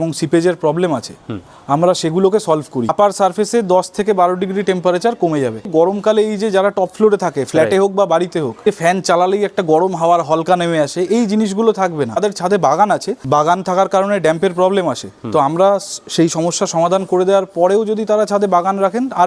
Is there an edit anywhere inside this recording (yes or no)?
yes